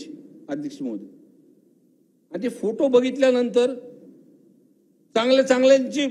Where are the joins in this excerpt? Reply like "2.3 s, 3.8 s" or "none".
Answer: none